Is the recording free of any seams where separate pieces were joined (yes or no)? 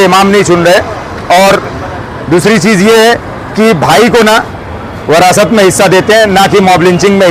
yes